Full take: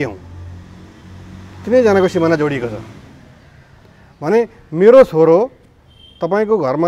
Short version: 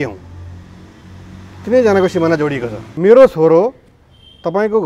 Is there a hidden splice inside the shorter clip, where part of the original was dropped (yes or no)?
yes